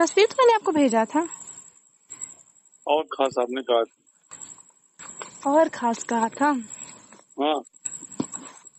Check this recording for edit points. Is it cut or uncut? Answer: cut